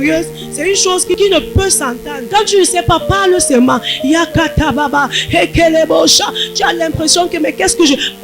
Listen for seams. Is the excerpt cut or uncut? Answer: cut